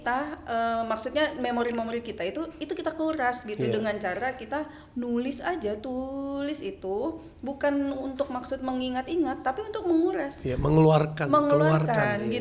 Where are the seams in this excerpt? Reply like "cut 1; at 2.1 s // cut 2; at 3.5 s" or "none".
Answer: none